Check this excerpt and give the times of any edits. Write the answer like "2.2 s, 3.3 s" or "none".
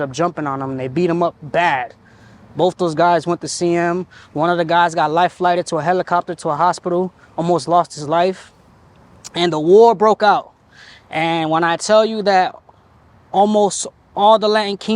none